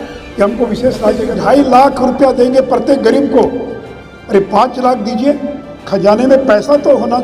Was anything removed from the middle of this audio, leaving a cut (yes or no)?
yes